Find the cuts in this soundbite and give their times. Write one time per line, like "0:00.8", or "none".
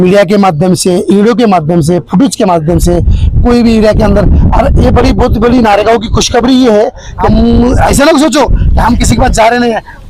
0:07.1

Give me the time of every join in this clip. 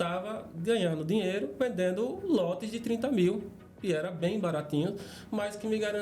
none

